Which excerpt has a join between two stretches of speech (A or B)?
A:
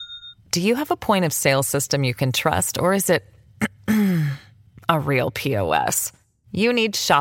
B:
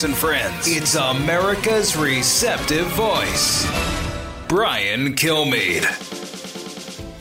B